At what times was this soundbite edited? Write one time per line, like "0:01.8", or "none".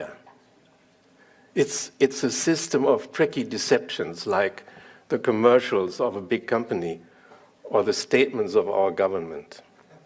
0:09.0

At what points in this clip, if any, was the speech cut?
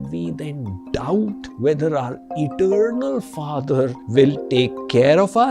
0:01.4
0:04.0

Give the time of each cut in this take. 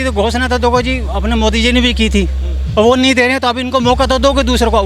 none

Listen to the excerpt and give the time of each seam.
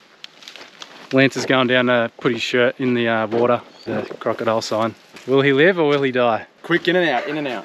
0:01.1
0:06.5

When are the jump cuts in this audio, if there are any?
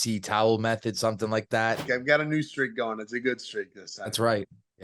0:01.8

